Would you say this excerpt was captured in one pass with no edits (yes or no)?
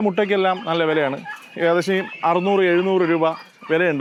yes